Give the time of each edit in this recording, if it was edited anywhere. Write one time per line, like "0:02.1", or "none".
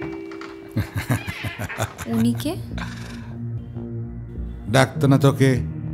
0:03.6